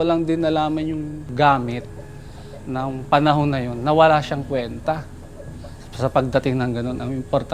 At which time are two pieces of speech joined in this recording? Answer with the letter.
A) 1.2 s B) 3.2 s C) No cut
A